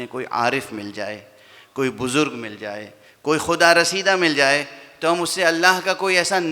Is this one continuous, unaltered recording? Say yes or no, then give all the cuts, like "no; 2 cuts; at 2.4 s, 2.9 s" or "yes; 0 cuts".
yes; 0 cuts